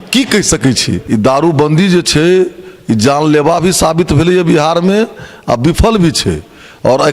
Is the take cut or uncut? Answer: cut